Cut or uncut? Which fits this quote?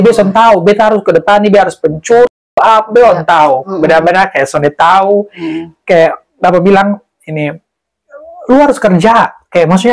uncut